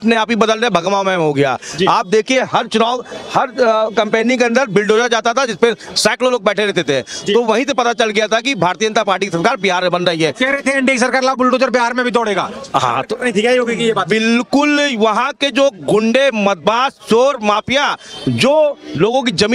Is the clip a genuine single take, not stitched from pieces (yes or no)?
yes